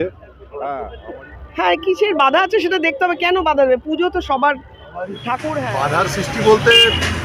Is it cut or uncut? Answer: cut